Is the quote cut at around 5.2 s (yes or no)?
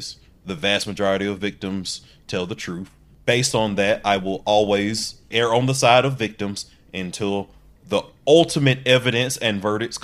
yes